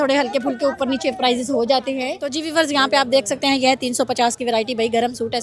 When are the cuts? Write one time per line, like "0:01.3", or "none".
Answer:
0:02.3